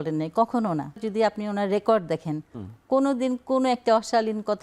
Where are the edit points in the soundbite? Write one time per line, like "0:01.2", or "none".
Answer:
0:01.0